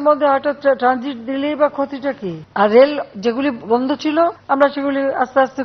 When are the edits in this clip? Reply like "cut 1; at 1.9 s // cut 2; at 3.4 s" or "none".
cut 1; at 2.3 s // cut 2; at 4.4 s

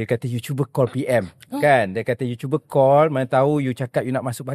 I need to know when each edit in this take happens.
none

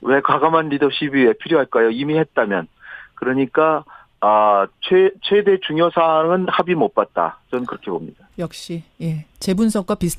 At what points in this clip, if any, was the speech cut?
cut 1; at 8.5 s

